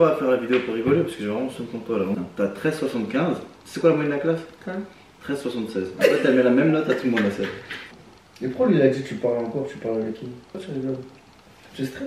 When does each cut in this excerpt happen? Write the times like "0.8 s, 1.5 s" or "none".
2.2 s, 7.7 s, 10.5 s